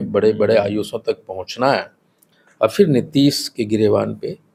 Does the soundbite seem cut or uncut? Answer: uncut